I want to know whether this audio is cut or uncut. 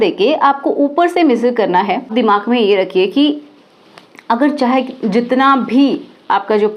cut